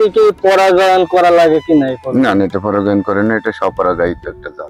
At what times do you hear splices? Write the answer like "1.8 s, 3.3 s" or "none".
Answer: none